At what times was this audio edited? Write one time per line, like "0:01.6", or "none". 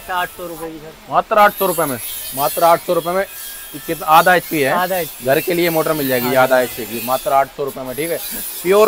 none